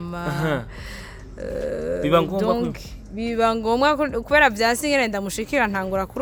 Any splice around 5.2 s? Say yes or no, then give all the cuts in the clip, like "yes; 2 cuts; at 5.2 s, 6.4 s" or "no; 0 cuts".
no; 0 cuts